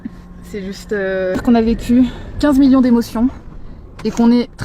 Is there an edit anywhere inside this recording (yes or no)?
yes